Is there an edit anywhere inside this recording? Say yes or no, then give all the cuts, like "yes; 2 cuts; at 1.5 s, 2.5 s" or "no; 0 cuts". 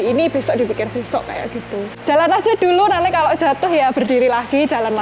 yes; 1 cut; at 1.9 s